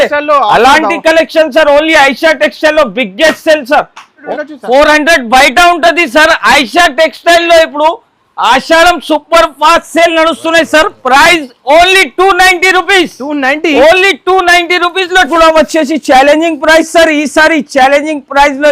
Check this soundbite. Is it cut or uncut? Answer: cut